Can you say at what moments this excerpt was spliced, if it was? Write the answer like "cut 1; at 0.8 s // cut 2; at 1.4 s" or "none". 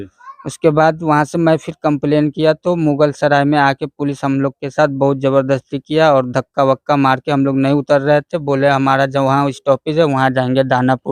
none